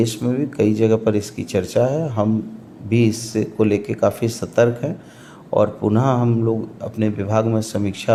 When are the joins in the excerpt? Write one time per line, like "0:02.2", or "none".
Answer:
none